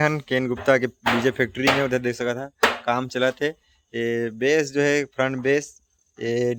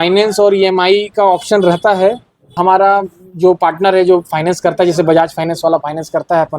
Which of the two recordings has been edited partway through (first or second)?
second